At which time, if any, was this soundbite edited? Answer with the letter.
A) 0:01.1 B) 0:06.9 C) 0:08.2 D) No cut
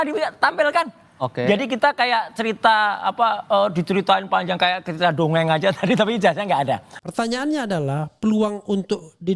B